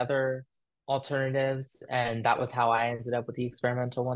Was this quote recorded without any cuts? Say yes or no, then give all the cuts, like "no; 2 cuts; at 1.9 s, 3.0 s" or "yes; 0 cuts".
yes; 0 cuts